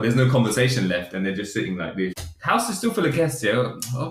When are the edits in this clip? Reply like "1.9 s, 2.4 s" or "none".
2.2 s

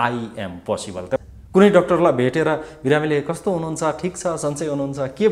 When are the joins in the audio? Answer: 1.2 s

